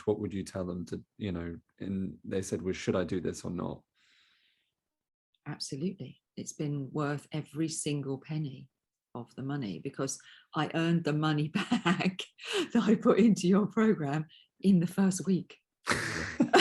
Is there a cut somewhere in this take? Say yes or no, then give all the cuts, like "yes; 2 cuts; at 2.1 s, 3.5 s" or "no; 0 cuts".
no; 0 cuts